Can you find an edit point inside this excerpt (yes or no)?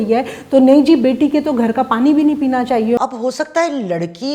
yes